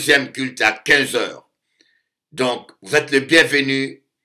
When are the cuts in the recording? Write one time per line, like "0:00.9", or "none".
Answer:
none